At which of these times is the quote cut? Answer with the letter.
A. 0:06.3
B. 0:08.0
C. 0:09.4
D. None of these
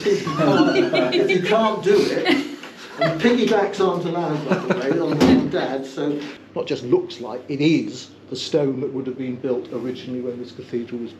A